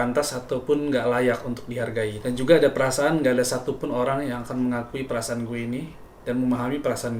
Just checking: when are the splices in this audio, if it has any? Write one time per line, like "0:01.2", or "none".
none